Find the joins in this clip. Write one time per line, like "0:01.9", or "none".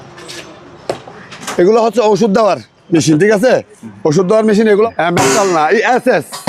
0:04.9